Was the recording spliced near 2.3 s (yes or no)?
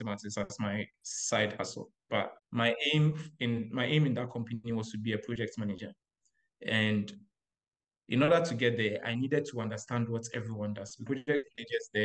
yes